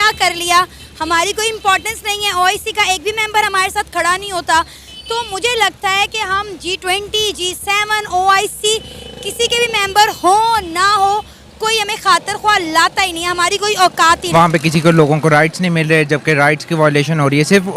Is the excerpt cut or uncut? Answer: cut